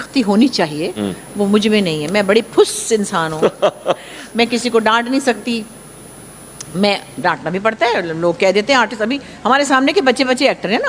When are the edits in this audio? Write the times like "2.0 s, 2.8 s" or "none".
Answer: none